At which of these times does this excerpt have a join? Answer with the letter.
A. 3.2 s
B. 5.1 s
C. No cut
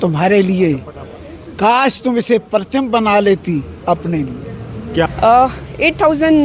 B